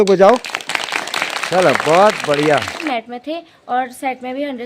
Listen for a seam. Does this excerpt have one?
yes; 1 cut; at 2.8 s

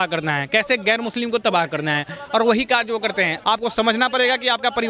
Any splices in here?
yes; 1 cut; at 3.4 s

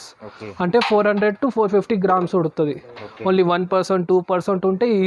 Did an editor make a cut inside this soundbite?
no; 0 cuts

